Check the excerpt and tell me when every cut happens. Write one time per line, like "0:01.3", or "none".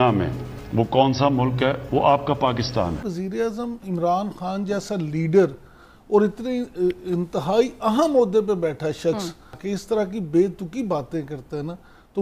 0:03.0
0:09.6

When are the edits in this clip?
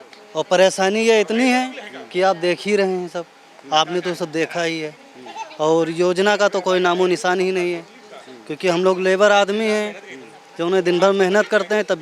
none

